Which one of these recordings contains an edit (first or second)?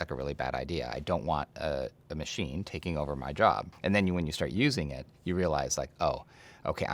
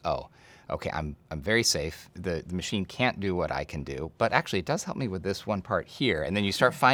first